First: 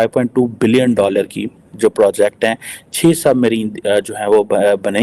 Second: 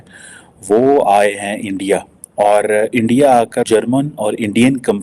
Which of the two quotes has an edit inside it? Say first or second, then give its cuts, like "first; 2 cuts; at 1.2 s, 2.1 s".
second; 1 cut; at 3.7 s